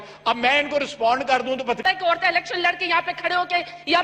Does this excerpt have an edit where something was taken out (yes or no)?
yes